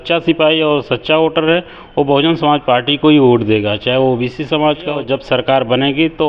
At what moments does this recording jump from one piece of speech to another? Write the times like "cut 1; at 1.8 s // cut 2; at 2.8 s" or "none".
cut 1; at 5.0 s